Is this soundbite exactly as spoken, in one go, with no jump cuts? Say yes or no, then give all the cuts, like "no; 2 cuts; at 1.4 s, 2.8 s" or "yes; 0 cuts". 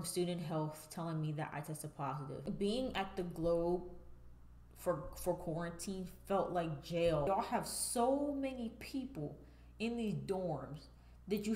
no; 2 cuts; at 2.8 s, 7.3 s